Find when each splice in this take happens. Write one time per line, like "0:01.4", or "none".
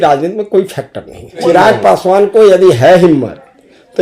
0:01.4